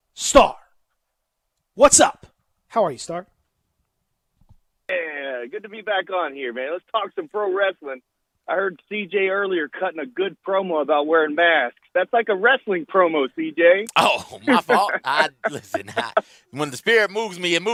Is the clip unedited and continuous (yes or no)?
yes